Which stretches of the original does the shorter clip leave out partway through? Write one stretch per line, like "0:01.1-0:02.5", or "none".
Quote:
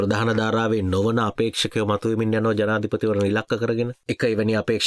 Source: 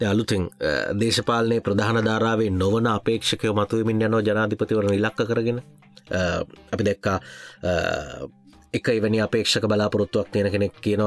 0:05.6-0:08.6